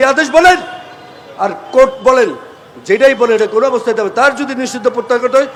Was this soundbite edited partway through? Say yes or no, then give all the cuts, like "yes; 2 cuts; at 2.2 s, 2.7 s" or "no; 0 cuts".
no; 0 cuts